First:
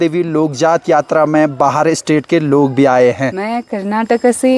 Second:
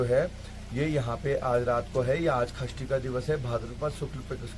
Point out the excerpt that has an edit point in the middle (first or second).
first